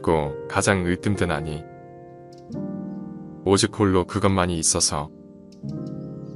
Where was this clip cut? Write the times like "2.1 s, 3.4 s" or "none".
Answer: none